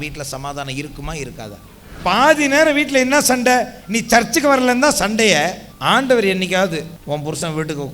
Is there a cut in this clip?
yes; 3 cuts; at 2.0 s, 5.7 s, 6.9 s

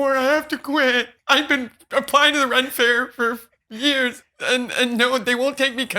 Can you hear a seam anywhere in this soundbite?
yes; 2 cuts; at 1.1 s, 4.2 s

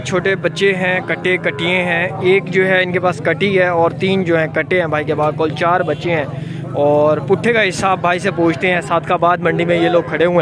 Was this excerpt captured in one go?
yes; 0 cuts

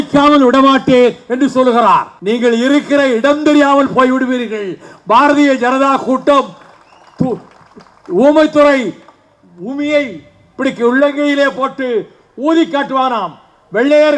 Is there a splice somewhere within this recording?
yes; 1 cut; at 2.1 s

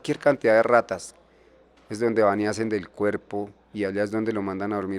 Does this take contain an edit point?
no; 0 cuts

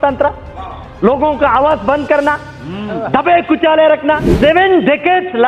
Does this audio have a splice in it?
yes; 1 cut; at 4.3 s

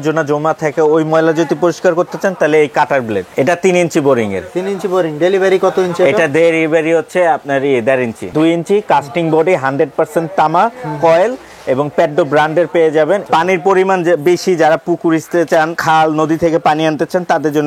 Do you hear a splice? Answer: yes; 3 cuts; at 3.3 s, 8.3 s, 13.2 s

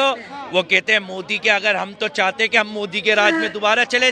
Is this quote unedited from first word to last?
yes; 0 cuts

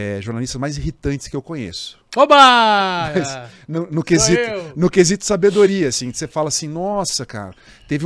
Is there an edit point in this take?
no; 0 cuts

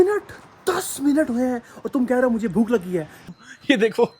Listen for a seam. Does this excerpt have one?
yes; 1 cut; at 3.3 s

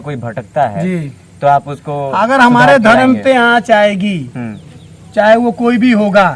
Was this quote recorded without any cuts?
yes; 0 cuts

